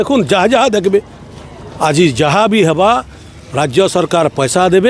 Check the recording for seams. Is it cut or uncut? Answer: uncut